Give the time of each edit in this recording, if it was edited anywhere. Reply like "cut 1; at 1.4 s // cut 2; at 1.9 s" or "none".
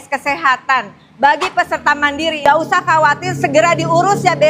cut 1; at 2.4 s